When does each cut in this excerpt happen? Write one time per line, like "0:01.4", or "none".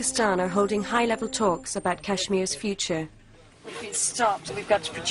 0:01.8